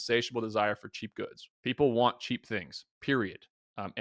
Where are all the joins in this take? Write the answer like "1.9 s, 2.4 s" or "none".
1.5 s